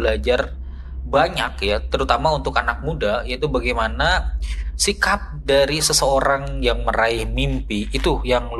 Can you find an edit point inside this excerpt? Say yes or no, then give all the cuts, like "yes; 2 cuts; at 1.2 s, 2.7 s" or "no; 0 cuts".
no; 0 cuts